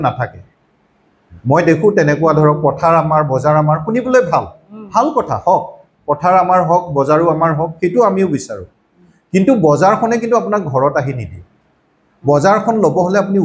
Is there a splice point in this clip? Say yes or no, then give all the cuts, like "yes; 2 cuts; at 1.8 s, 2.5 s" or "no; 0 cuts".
no; 0 cuts